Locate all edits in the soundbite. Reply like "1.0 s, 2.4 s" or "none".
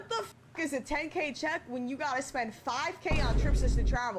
none